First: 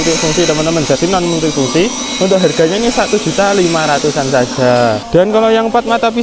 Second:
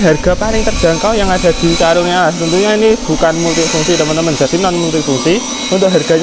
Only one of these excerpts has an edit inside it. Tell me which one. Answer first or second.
first